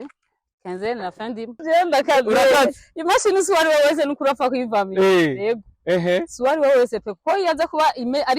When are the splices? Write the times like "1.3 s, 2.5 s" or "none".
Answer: 1.6 s